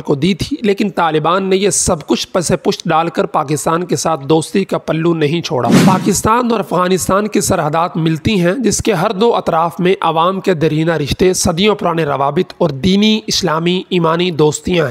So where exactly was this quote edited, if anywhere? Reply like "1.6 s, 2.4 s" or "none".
5.8 s

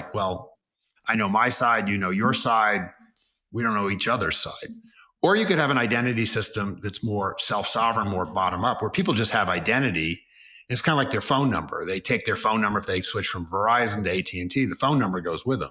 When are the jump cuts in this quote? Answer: none

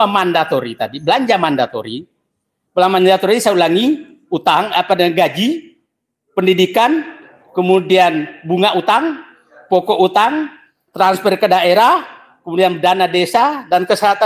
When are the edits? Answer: none

